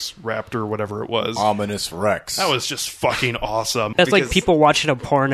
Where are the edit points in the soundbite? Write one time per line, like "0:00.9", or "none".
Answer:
0:03.9